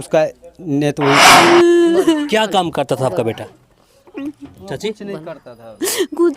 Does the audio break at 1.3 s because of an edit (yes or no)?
yes